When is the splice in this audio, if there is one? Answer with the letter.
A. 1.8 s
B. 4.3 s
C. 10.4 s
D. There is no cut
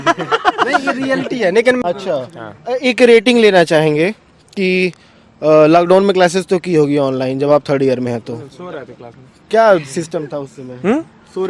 A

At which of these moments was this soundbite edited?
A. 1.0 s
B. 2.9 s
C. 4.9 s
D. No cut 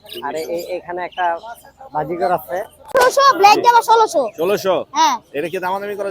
B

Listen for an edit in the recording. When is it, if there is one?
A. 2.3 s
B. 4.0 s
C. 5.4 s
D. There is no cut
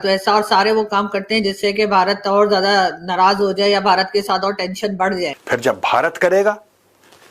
C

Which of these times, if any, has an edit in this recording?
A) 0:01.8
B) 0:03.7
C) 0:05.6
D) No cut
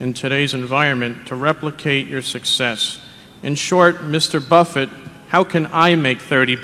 D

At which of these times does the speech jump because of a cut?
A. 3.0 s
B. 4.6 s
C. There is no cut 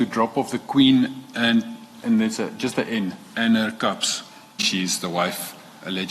B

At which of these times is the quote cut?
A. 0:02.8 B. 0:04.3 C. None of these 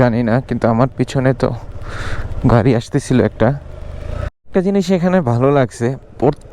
B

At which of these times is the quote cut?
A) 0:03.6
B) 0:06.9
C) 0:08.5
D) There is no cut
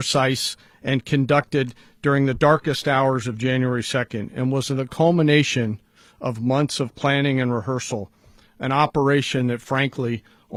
D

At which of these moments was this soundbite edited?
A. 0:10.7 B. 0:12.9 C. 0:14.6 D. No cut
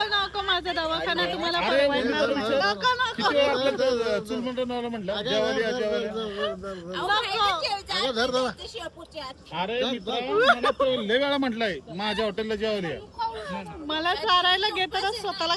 A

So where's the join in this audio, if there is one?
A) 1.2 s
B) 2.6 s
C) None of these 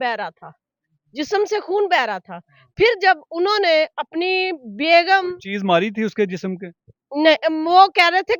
C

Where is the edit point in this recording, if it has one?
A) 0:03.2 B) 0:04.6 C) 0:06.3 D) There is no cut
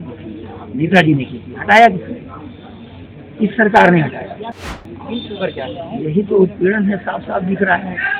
B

